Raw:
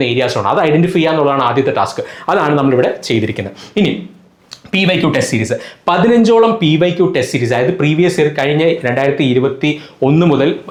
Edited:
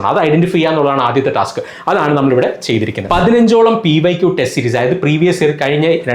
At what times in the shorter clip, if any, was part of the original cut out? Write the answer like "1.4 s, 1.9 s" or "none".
3.0 s